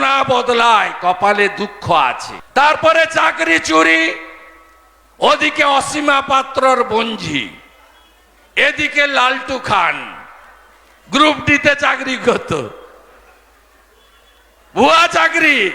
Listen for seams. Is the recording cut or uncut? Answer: uncut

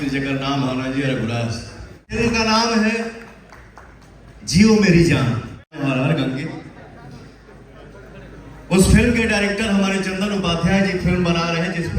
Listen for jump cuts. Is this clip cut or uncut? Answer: cut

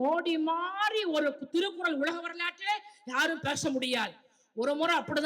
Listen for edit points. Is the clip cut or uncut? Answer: uncut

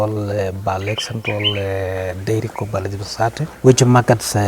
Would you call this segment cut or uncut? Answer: cut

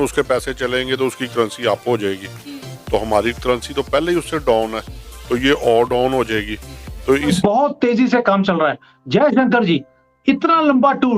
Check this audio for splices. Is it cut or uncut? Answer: cut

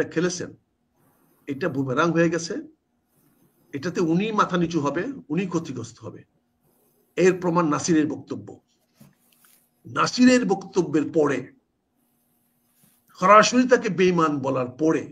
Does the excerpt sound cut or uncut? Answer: uncut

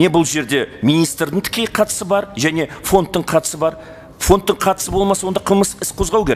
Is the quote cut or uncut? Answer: uncut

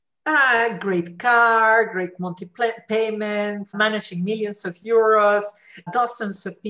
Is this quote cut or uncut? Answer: cut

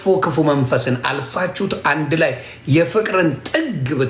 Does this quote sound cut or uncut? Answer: uncut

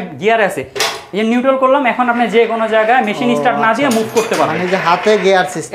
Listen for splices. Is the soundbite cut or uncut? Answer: uncut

